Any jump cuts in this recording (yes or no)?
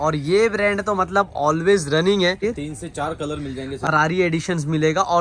yes